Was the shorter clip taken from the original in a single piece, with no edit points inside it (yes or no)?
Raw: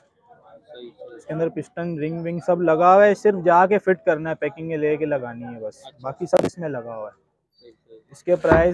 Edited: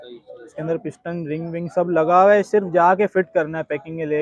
yes